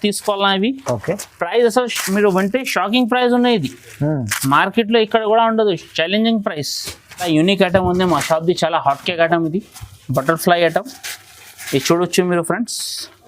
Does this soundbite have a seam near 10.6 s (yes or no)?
no